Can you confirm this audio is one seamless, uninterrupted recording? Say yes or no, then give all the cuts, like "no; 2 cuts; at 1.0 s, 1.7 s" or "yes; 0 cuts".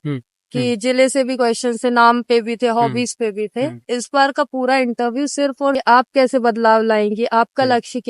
no; 1 cut; at 5.8 s